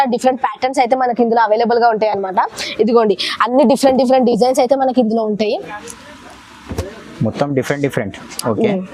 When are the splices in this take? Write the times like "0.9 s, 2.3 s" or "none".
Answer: none